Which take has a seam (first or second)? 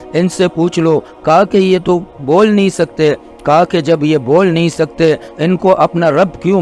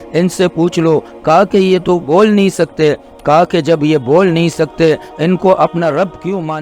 second